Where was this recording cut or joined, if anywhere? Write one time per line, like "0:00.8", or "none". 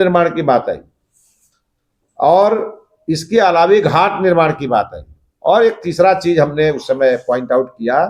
none